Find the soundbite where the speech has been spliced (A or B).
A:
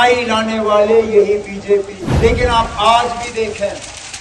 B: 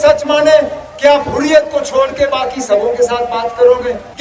A